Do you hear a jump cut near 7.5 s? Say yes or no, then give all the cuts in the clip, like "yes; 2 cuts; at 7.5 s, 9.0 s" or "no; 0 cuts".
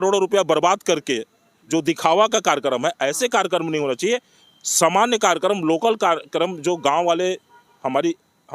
no; 0 cuts